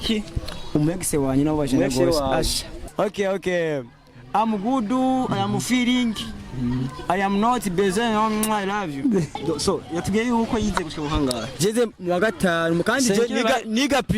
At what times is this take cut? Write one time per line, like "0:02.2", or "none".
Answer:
0:02.9
0:09.3